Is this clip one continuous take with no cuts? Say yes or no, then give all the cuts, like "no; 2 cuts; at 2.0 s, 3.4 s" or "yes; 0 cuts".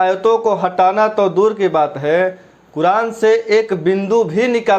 yes; 0 cuts